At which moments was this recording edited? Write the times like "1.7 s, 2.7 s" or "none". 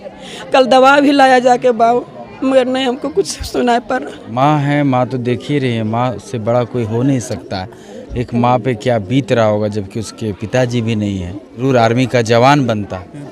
4.3 s, 11.6 s